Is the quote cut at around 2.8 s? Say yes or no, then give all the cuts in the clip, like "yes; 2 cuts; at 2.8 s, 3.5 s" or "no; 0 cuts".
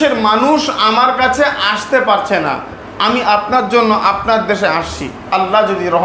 yes; 1 cut; at 2.8 s